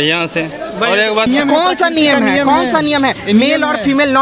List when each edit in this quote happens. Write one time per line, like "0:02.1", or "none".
0:01.3